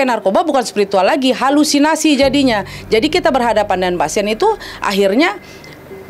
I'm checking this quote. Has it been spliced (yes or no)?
no